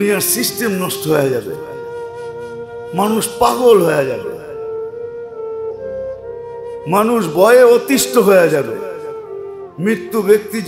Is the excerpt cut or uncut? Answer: cut